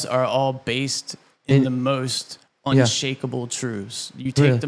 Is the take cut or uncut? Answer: uncut